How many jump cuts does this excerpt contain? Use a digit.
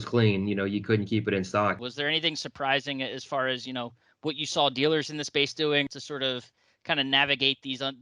2